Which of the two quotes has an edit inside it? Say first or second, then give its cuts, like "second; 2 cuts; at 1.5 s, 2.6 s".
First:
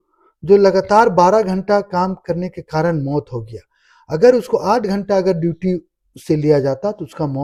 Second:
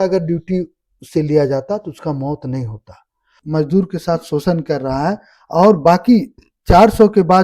second; 1 cut; at 3.4 s